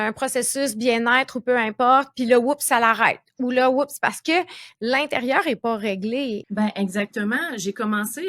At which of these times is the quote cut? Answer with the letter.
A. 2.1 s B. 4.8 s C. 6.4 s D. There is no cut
C